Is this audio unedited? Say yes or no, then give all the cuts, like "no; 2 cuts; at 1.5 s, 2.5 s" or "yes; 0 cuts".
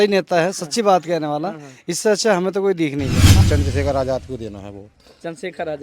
no; 1 cut; at 3.3 s